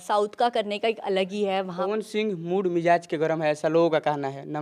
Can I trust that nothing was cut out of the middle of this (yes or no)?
no